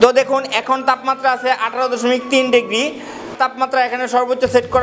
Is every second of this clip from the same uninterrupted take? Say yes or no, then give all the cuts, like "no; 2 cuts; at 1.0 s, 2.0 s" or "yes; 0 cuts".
no; 1 cut; at 3.3 s